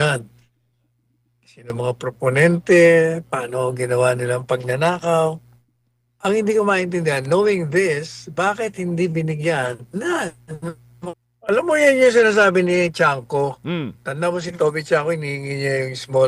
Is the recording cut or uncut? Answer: cut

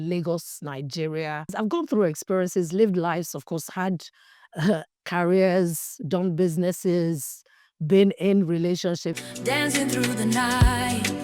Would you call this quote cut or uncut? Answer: cut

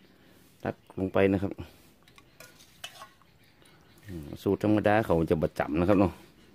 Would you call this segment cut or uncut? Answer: uncut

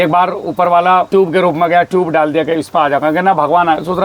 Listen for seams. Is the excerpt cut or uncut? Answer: cut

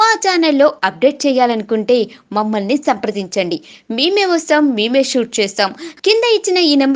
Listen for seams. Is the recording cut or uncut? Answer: uncut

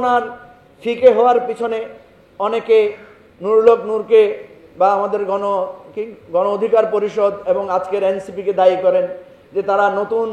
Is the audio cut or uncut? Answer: uncut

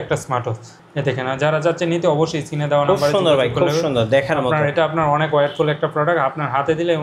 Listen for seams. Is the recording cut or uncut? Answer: uncut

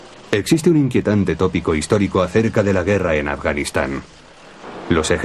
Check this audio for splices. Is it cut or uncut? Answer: uncut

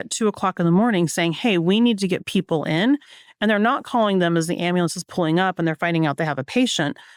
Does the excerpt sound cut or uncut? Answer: uncut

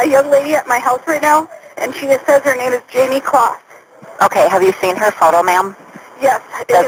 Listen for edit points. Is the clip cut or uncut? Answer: uncut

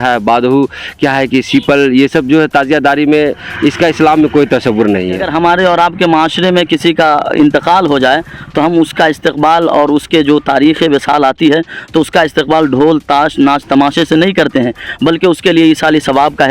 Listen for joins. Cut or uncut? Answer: cut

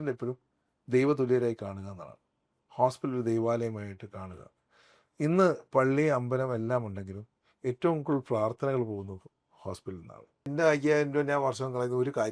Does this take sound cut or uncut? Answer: cut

